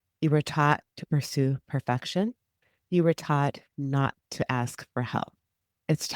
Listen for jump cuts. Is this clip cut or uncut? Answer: cut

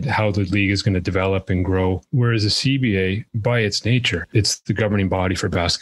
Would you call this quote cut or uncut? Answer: cut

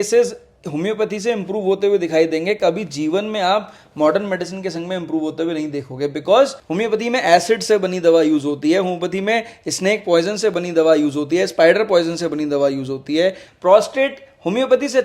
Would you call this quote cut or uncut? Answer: cut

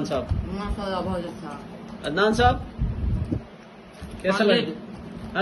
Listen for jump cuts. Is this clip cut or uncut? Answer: uncut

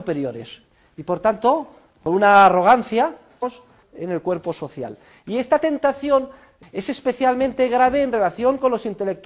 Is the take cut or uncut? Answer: uncut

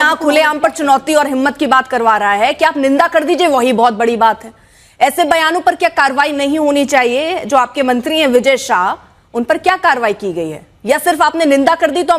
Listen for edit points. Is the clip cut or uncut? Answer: uncut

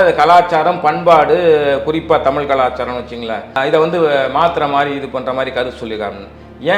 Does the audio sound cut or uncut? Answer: cut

